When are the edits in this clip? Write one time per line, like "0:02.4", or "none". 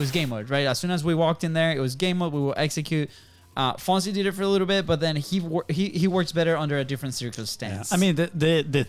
none

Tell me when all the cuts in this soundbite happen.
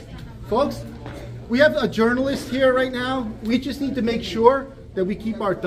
none

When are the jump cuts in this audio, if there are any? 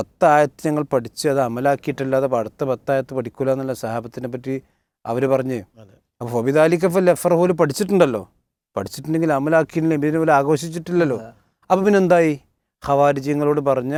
none

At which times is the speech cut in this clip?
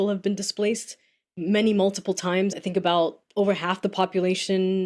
0:02.6

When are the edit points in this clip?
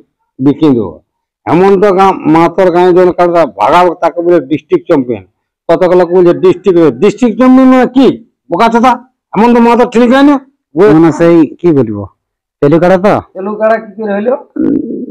0:10.8
0:13.4

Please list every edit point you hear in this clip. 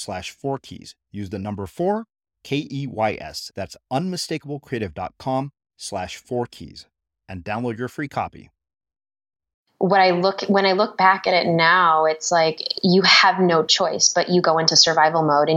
0:09.7

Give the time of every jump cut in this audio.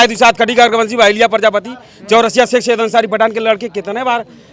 none

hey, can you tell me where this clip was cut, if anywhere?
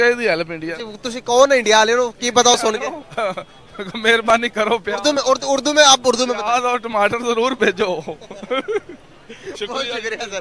none

